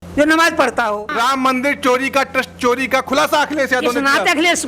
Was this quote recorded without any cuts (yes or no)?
no